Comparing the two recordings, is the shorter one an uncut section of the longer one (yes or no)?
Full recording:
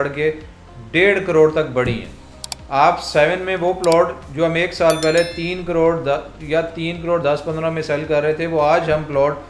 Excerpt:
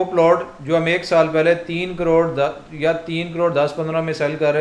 yes